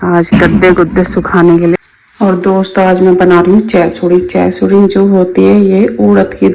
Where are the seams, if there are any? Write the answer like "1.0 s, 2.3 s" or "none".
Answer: 1.8 s